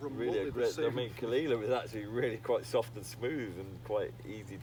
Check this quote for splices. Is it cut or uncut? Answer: uncut